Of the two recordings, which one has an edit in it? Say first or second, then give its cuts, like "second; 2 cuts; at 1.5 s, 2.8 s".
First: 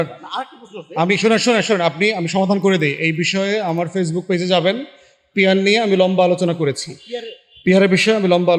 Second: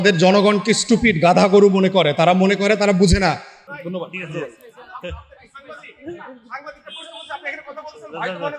second; 1 cut; at 3.5 s